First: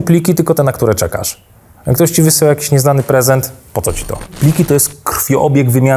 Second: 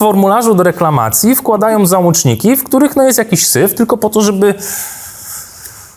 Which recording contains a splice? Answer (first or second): first